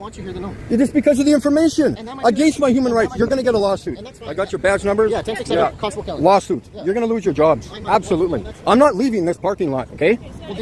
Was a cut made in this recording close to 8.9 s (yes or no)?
yes